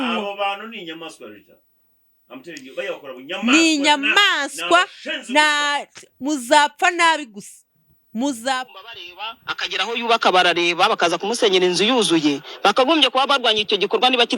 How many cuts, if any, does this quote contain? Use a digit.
1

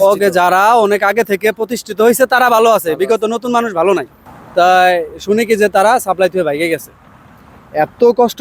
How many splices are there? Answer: 1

